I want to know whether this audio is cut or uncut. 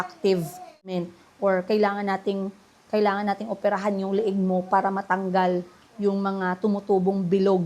cut